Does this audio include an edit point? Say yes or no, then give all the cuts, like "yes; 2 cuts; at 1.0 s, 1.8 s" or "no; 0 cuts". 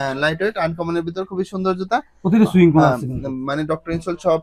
no; 0 cuts